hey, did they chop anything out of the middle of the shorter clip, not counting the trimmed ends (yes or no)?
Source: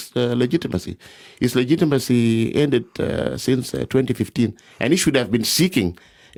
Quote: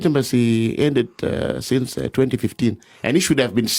no